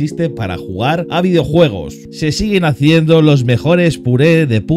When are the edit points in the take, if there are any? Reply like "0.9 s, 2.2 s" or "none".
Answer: 2.0 s